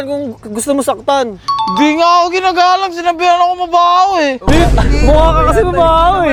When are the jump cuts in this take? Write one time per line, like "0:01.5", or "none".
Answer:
none